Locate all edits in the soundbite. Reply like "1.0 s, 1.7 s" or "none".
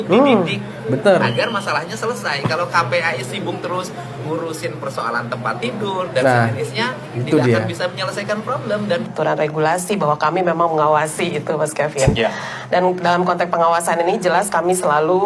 none